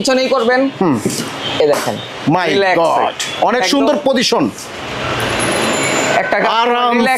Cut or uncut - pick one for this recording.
uncut